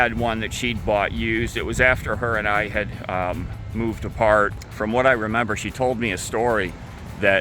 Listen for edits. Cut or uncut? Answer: cut